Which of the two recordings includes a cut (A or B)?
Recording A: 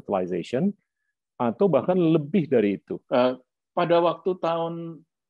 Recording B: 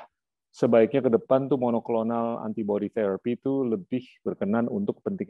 A